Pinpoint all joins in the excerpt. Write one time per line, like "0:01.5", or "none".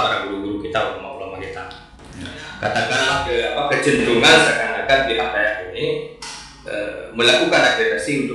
0:03.2